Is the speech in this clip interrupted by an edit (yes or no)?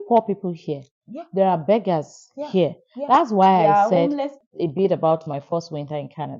yes